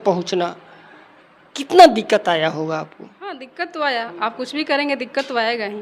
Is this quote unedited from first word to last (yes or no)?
no